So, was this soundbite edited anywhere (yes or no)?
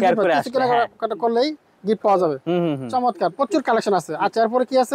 no